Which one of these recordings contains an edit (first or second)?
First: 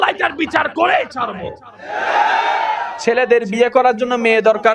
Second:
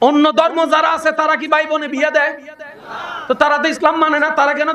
first